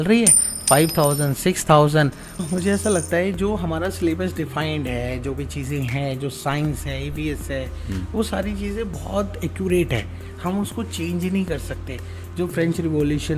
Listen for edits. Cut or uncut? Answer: cut